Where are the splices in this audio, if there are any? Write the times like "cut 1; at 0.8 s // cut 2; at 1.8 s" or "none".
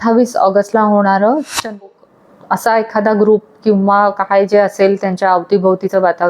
cut 1; at 1.8 s